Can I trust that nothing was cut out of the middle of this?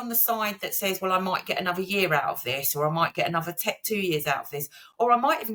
yes; 0 cuts

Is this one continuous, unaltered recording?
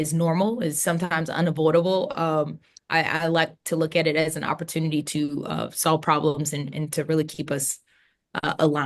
yes; 0 cuts

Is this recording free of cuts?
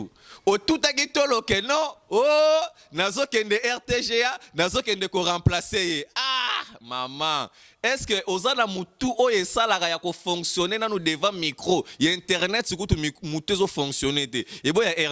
yes; 0 cuts

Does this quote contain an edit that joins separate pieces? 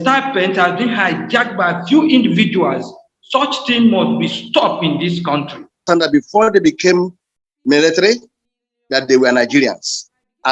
yes; 1 cut; at 5.8 s

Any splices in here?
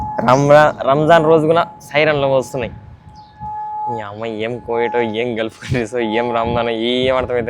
no; 0 cuts

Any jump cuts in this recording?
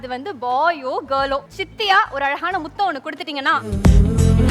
yes; 2 cuts; at 1.6 s, 3.6 s

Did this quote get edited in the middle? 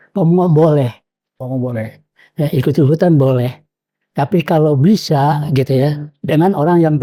no; 0 cuts

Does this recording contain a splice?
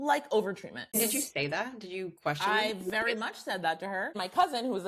yes; 2 cuts; at 1.0 s, 4.2 s

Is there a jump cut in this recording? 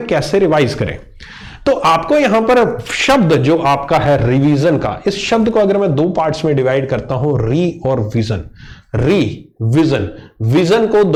no; 0 cuts

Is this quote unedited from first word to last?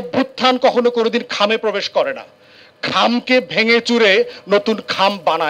yes; 0 cuts

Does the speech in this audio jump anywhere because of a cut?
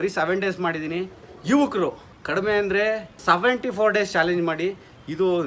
yes; 2 cuts; at 2.1 s, 3.1 s

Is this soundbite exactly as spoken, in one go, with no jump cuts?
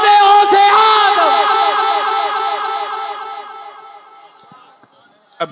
yes; 0 cuts

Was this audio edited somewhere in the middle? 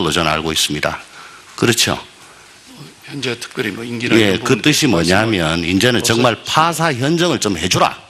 yes; 1 cut; at 5.6 s

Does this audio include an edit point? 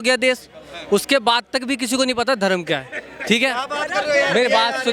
no; 0 cuts

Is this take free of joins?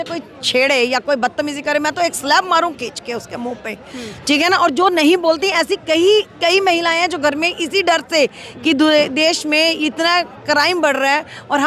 yes; 0 cuts

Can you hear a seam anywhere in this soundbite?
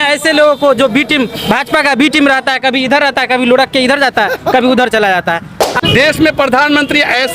yes; 1 cut; at 5.8 s

